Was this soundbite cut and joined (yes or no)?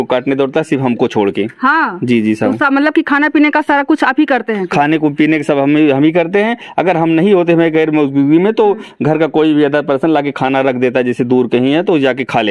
no